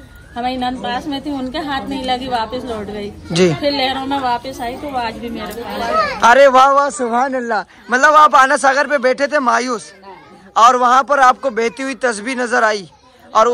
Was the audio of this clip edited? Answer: no; 0 cuts

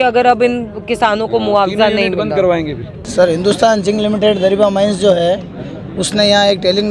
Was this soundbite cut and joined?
no; 0 cuts

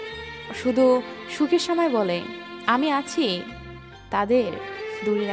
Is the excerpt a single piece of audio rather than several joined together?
yes; 0 cuts

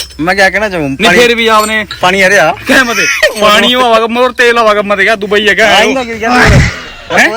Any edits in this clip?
no; 0 cuts

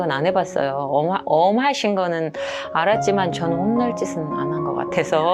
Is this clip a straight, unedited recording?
yes; 0 cuts

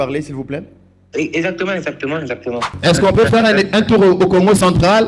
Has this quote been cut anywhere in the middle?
yes; 1 cut; at 2.7 s

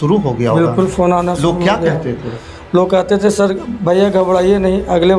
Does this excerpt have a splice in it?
no; 0 cuts

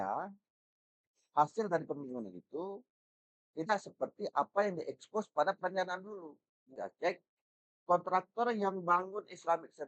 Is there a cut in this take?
yes; 1 cut; at 6.8 s

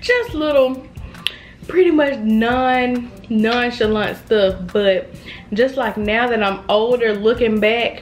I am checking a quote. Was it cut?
no; 0 cuts

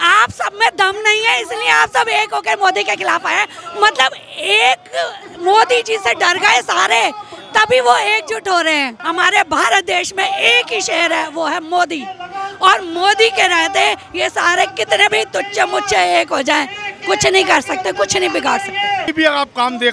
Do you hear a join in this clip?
yes; 2 cuts; at 9.0 s, 19.1 s

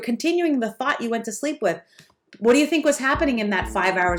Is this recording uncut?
yes; 0 cuts

